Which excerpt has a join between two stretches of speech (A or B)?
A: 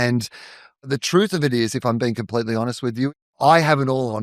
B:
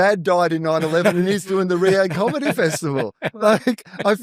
A